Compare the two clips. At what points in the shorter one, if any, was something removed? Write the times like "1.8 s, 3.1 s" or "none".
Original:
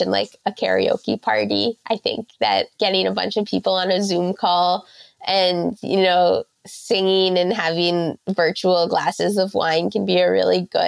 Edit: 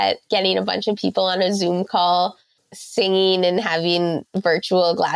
2.6 s